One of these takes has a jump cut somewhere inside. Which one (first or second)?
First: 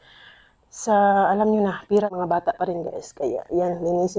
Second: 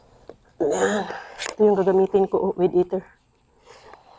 first